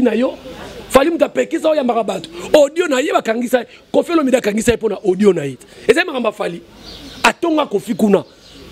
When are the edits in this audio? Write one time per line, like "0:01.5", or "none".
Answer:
none